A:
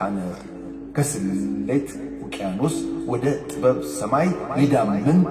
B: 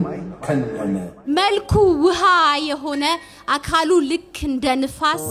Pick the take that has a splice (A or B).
B